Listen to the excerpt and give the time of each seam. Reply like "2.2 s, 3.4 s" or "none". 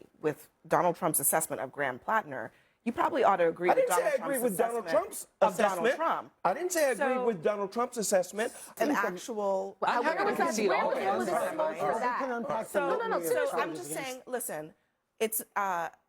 8.8 s